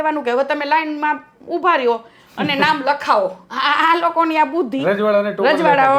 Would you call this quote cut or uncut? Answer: uncut